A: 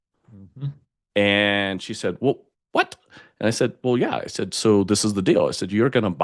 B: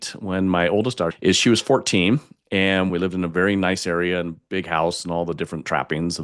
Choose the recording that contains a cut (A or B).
B